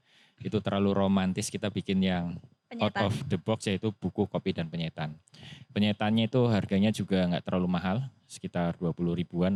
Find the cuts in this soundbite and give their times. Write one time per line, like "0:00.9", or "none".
none